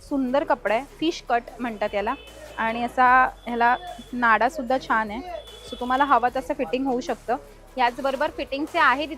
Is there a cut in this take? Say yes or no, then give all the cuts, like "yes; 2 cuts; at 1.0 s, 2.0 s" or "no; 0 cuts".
no; 0 cuts